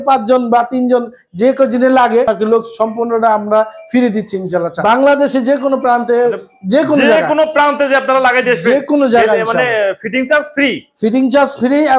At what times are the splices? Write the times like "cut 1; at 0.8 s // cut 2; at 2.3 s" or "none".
cut 1; at 4.8 s